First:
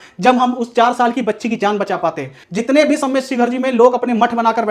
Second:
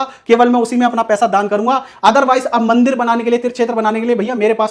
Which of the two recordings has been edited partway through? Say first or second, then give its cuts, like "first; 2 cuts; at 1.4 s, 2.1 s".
first; 1 cut; at 2.4 s